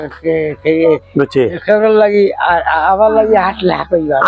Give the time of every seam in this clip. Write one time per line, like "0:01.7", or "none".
none

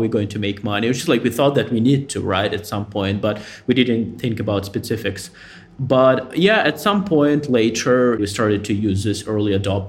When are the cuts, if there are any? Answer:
0:04.1
0:08.2

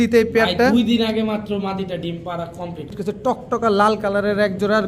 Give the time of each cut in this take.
0:02.9

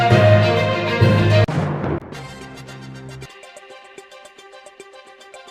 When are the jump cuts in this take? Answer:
0:01.4

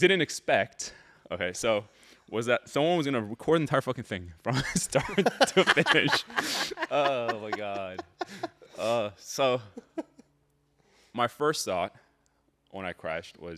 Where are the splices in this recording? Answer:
none

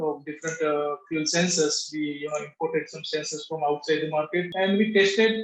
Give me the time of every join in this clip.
0:04.5

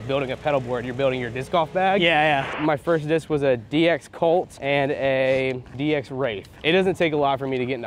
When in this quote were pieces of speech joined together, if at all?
0:02.5
0:04.5
0:05.9

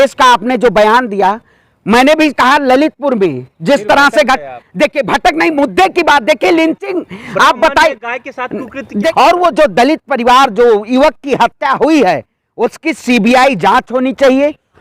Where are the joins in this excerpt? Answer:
0:09.1

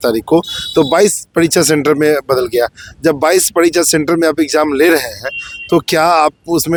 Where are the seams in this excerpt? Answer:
none

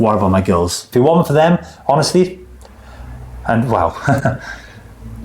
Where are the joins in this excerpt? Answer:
0:00.9

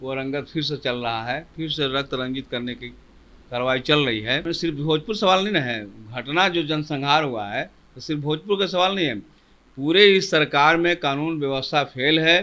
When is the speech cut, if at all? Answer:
0:04.4

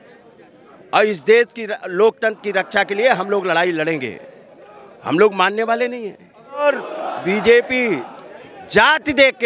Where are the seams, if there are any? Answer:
0:06.6

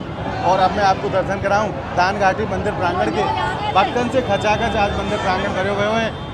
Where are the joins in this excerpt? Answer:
none

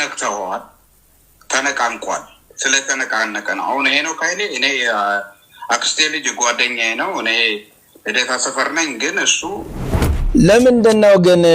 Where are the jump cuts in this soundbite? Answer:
0:09.8

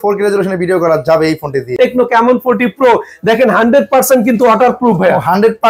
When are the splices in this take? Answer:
0:01.8

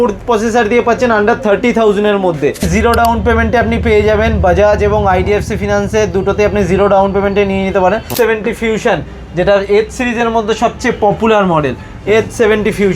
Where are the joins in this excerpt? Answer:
0:02.7
0:08.1

